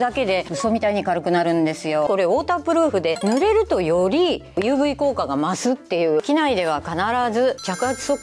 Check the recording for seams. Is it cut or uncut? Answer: cut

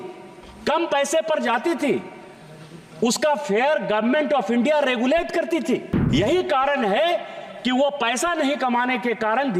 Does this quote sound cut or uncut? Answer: cut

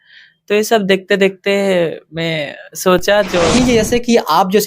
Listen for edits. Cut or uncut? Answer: cut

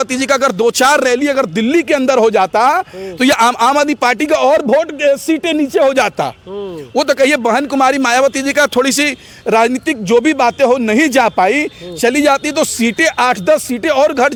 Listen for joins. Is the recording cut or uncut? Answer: uncut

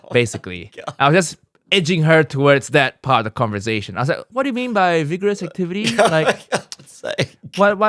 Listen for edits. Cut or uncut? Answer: uncut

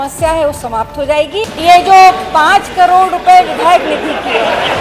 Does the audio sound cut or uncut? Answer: cut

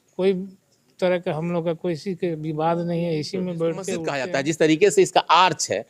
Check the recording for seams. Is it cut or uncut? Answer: cut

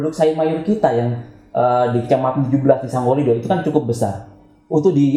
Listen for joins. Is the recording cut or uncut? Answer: uncut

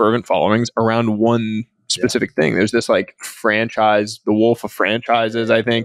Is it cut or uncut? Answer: uncut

